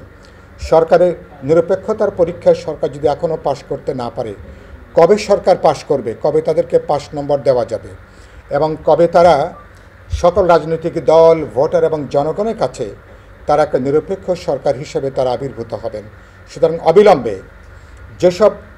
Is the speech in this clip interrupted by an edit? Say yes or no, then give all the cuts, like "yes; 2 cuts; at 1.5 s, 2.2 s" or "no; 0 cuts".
no; 0 cuts